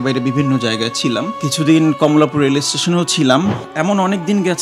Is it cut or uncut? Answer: cut